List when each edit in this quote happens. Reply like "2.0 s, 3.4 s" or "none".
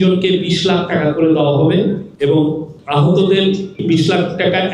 2.1 s, 2.7 s, 3.8 s